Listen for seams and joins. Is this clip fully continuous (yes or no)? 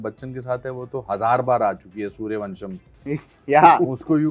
yes